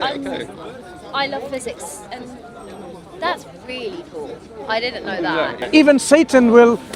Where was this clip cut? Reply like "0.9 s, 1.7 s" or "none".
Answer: 5.6 s